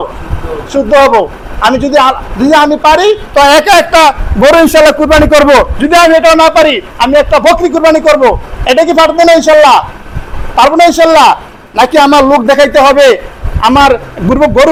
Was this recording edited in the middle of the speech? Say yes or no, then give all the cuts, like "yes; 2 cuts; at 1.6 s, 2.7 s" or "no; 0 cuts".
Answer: no; 0 cuts